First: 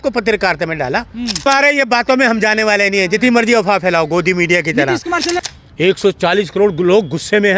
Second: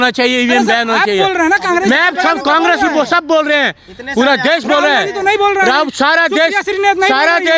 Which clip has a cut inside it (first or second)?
first